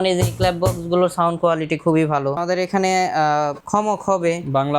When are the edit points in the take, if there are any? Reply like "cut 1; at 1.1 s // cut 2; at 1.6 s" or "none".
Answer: cut 1; at 2.4 s // cut 2; at 3.6 s

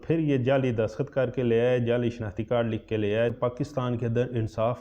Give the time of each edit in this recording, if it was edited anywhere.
cut 1; at 3.3 s

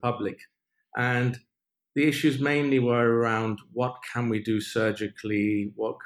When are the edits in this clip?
none

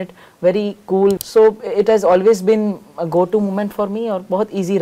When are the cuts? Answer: cut 1; at 1.2 s

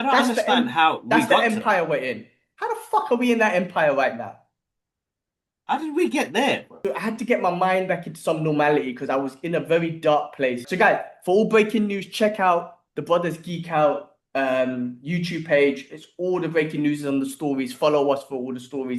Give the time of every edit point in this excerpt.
cut 1; at 6.7 s // cut 2; at 10.7 s

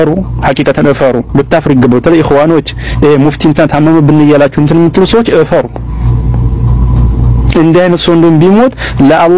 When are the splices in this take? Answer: none

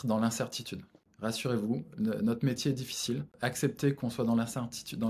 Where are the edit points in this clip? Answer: cut 1; at 1.1 s // cut 2; at 3.3 s

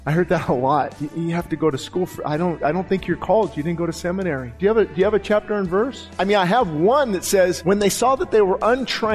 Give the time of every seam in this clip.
cut 1; at 1.0 s // cut 2; at 2.6 s // cut 3; at 4.5 s // cut 4; at 6.0 s // cut 5; at 7.6 s

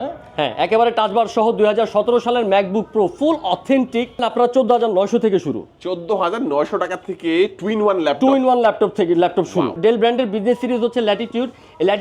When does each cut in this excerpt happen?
cut 1; at 4.2 s // cut 2; at 9.8 s

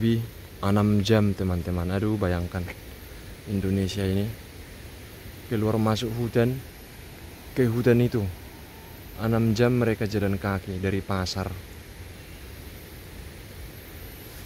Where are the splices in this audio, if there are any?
none

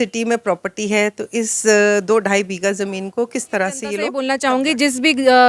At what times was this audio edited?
cut 1; at 4.2 s

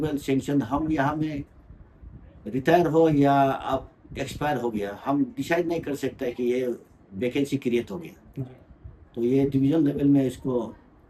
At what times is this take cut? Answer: none

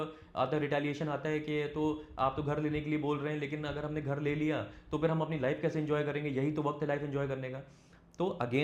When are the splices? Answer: none

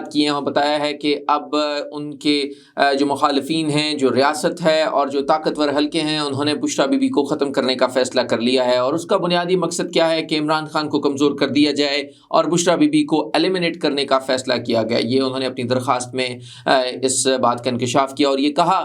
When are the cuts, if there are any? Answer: none

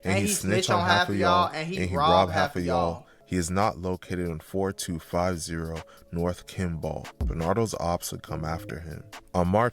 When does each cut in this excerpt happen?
cut 1; at 3.1 s // cut 2; at 7.2 s

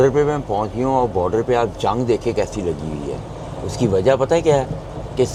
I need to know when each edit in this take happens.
none

